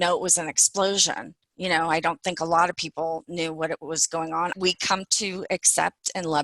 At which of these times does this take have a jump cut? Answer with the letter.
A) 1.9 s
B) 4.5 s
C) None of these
B